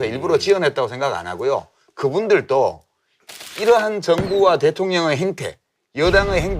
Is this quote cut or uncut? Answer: cut